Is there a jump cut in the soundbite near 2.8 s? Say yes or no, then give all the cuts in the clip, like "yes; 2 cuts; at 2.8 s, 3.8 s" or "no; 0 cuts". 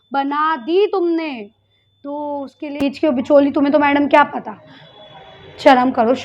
yes; 1 cut; at 2.8 s